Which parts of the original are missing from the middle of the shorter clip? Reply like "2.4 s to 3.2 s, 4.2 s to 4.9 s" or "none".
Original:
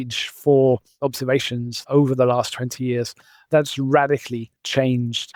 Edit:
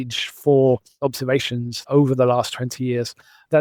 none

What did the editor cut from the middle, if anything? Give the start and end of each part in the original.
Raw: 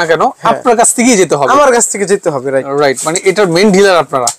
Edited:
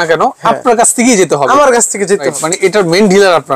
2.3 s to 3.0 s

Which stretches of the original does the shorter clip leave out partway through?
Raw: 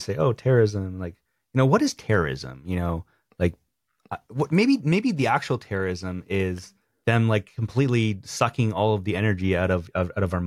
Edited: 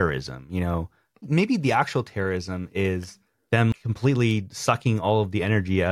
3.4 s to 4.8 s, 7.3 s to 7.4 s

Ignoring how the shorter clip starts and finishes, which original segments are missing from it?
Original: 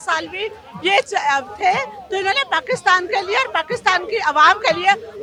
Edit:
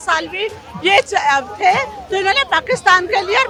none

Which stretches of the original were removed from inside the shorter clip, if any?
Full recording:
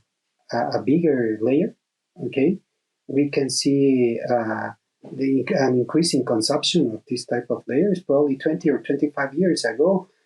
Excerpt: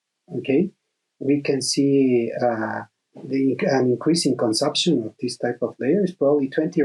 none

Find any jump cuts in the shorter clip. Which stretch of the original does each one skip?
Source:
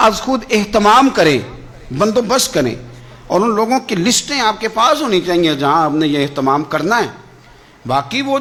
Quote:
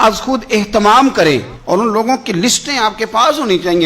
1.5 s to 3.2 s

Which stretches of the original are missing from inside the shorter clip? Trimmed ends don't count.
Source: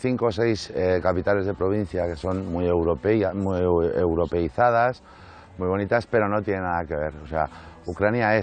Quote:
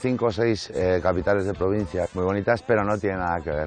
2.1 s to 5.5 s

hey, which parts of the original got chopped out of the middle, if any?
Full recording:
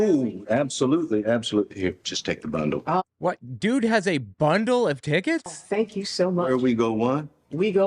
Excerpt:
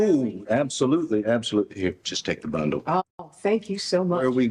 3.2 s to 5.4 s

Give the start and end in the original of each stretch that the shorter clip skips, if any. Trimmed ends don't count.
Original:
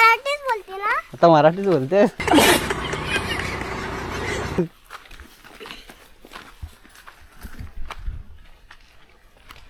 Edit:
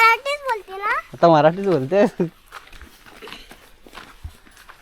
2.1 s to 4.5 s

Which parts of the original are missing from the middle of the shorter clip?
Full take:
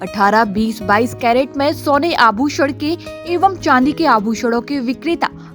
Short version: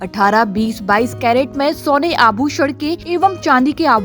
3.0 s to 3.2 s

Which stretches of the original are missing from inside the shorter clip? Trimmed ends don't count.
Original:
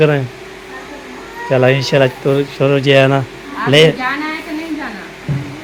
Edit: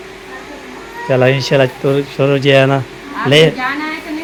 none

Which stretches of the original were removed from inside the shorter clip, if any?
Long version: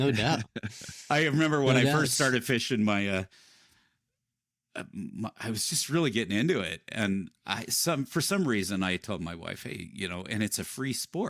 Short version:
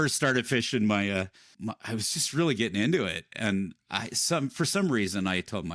3.4 s to 5.0 s

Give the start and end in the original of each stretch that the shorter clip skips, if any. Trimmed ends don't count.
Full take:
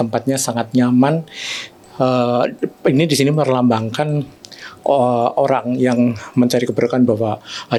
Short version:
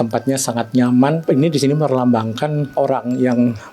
1.2 s to 2.8 s, 4.3 s to 5.3 s

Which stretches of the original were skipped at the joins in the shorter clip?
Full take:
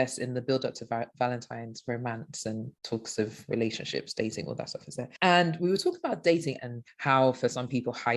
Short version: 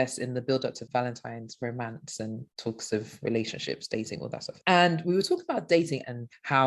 0.8 s to 1.1 s, 4.8 s to 5.1 s

